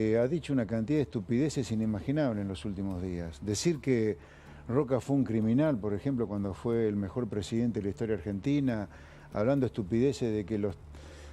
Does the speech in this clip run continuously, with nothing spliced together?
yes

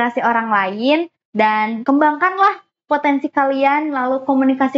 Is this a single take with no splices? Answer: no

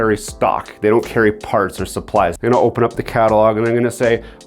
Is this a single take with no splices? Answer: no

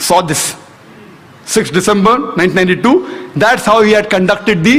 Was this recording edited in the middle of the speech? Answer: no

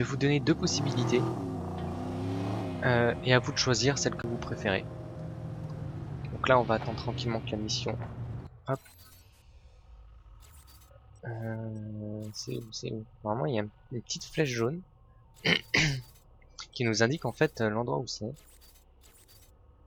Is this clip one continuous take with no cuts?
yes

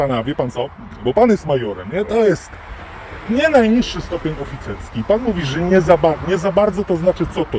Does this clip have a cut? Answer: no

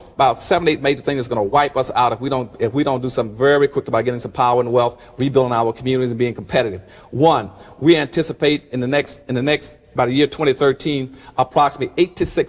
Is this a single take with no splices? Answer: yes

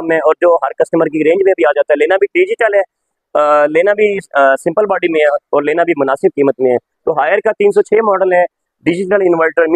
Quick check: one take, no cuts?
yes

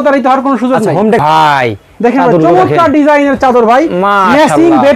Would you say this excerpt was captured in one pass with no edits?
no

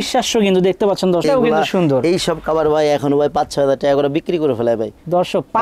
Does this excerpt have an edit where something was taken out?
yes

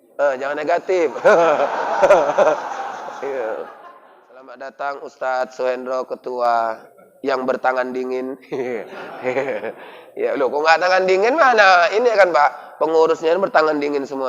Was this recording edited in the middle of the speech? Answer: yes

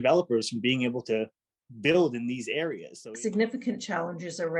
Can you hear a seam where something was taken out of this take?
yes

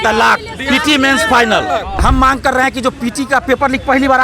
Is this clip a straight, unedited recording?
no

